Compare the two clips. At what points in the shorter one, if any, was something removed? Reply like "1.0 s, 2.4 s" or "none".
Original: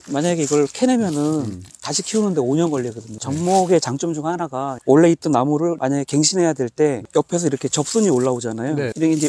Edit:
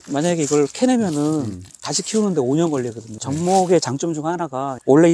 none